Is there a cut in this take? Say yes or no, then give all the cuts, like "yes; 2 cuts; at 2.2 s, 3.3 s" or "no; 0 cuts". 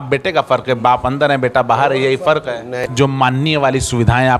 yes; 1 cut; at 2.8 s